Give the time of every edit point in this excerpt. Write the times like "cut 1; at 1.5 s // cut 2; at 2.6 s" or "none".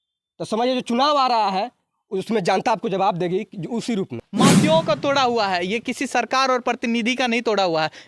cut 1; at 4.2 s